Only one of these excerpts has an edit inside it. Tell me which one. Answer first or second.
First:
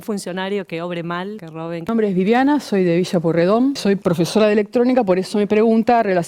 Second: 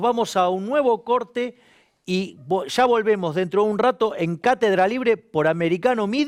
first